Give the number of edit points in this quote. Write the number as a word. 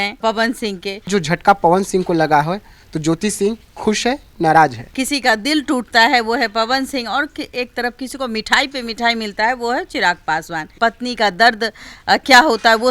three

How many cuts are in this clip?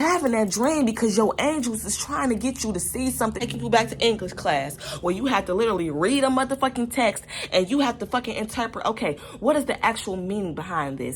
one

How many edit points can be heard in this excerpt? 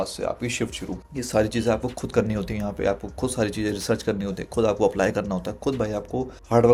zero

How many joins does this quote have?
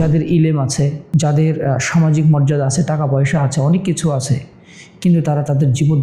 one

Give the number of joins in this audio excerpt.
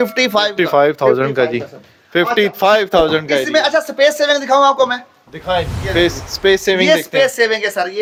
zero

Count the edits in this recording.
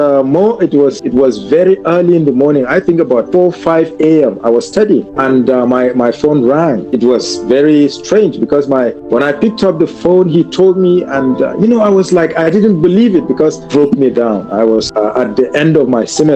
seven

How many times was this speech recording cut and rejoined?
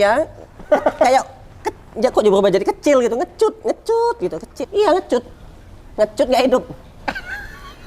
one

